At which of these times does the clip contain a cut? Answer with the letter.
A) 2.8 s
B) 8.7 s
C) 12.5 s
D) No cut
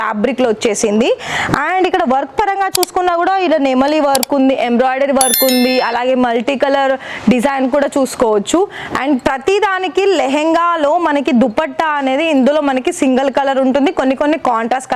D